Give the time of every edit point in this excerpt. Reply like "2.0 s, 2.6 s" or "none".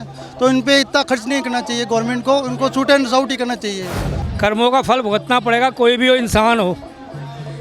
4.2 s